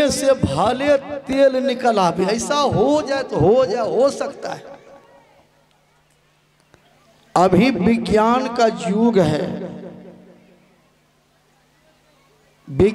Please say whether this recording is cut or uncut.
cut